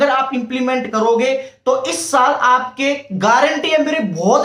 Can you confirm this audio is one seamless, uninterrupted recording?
yes; 0 cuts

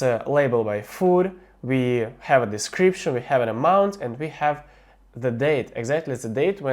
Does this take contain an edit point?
no; 0 cuts

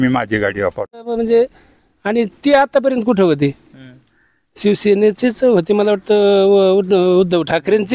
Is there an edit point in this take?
yes; 1 cut; at 1.2 s

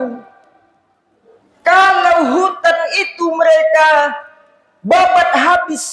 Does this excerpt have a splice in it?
no; 0 cuts

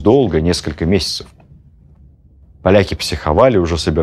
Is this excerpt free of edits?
yes; 0 cuts

